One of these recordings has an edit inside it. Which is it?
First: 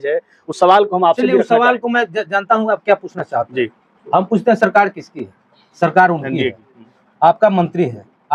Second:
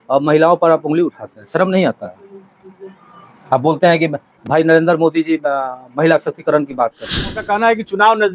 second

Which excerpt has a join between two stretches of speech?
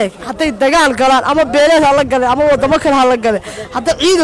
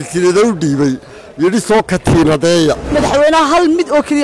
second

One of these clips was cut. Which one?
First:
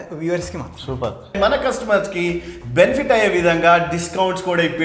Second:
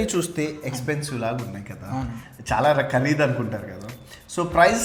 first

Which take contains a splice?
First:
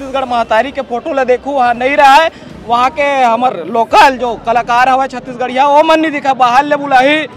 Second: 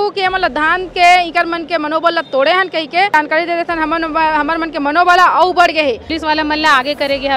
second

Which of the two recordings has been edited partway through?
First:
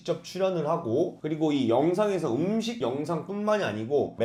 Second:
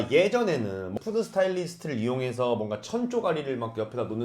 second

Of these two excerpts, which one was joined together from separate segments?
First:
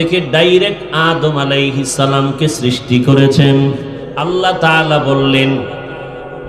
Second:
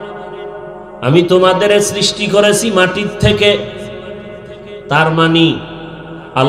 first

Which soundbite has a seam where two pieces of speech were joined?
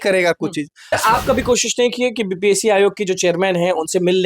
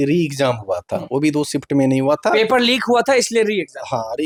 first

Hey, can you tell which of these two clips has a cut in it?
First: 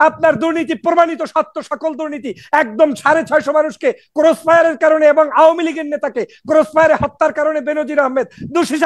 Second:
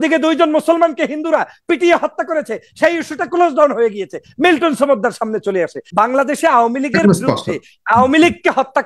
second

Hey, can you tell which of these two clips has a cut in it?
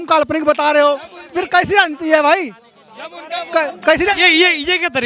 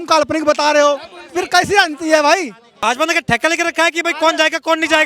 second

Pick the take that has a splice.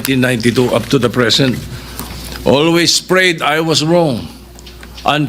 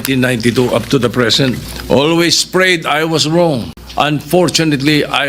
second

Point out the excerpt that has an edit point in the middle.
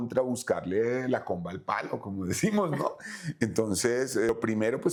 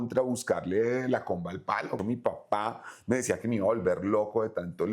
second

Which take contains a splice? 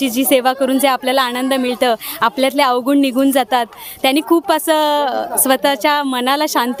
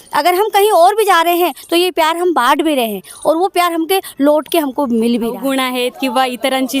second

